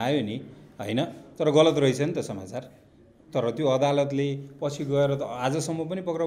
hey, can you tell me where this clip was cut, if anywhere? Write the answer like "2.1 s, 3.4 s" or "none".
none